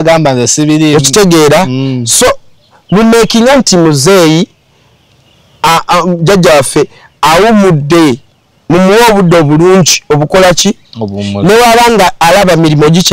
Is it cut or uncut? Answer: uncut